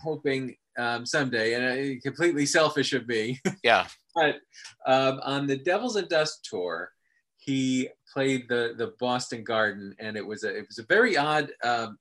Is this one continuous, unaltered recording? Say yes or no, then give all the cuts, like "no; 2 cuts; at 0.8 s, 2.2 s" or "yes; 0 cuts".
no; 1 cut; at 8.0 s